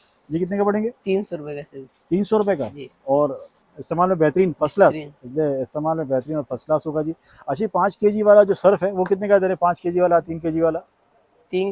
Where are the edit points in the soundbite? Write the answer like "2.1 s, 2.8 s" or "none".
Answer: none